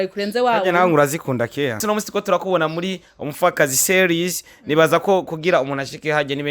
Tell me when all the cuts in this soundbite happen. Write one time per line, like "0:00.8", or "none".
0:01.8